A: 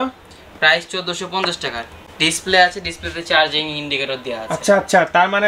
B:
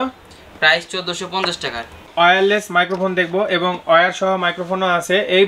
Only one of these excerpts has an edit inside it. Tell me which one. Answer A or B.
B